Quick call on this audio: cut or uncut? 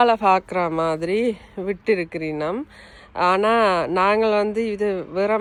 uncut